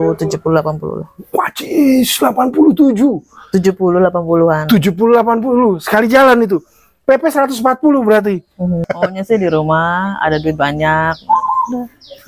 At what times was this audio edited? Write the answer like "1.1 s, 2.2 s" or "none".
8.9 s

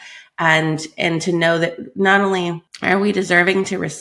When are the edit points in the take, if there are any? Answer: 2.7 s

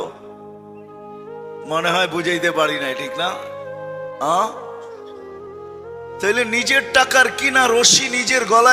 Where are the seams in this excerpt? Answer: 4.7 s, 6.2 s

